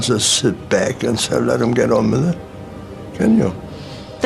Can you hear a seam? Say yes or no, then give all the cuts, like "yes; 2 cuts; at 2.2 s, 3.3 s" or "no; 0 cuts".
no; 0 cuts